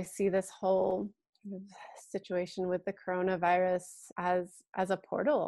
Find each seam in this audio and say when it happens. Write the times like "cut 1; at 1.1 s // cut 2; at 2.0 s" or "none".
cut 1; at 1.3 s // cut 2; at 4.0 s

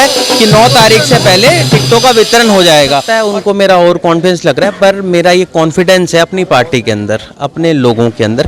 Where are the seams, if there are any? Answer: cut 1; at 3.1 s

